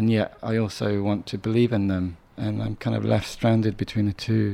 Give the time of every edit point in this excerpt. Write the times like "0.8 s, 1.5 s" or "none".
none